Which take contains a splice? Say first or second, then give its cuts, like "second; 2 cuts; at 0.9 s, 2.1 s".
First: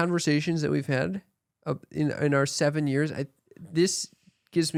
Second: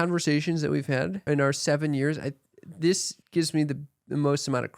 second; 2 cuts; at 1.2 s, 3.1 s